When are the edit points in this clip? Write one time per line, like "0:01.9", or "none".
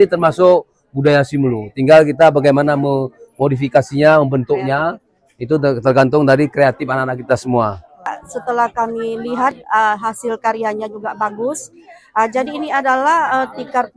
0:08.3